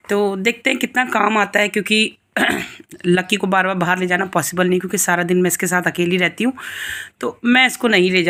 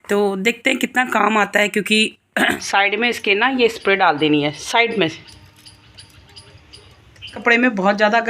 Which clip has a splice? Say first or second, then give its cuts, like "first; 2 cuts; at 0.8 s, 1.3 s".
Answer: second; 2 cuts; at 2.6 s, 7.4 s